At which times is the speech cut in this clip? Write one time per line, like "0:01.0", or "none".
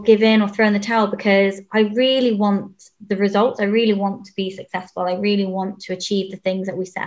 none